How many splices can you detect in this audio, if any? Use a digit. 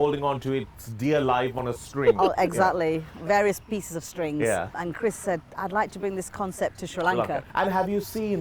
2